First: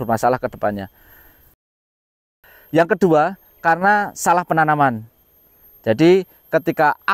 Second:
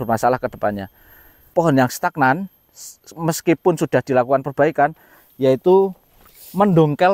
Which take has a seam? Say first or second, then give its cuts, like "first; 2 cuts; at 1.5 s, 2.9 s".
second; 1 cut; at 1.5 s